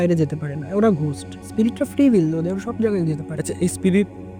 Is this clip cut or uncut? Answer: cut